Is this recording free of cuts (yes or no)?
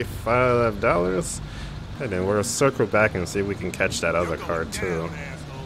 no